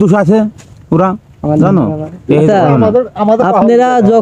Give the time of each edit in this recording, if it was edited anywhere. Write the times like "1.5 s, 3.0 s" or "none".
none